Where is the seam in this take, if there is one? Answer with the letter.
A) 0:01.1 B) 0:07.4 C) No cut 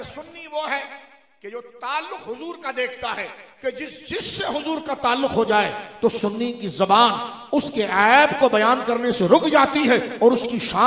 C